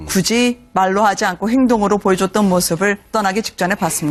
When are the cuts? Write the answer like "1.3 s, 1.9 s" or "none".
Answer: none